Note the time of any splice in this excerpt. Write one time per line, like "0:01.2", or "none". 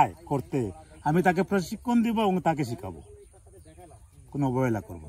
none